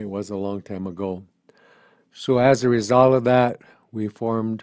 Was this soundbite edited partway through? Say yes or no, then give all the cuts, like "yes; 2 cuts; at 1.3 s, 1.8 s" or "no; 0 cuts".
yes; 1 cut; at 1.2 s